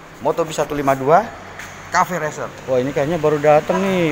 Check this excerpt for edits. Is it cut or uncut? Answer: cut